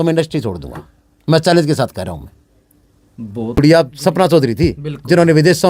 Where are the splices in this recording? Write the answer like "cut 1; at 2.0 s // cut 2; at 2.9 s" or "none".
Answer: cut 1; at 3.6 s